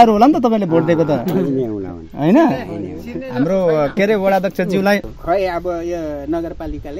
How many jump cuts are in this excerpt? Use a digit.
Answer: 1